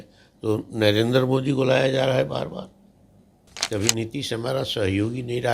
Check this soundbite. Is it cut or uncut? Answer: cut